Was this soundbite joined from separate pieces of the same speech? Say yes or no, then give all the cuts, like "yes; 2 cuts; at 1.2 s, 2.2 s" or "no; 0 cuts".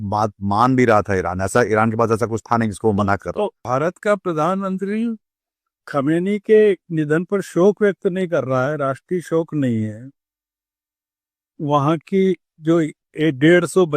yes; 1 cut; at 3.6 s